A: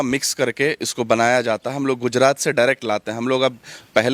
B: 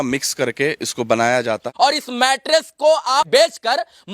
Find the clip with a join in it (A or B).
B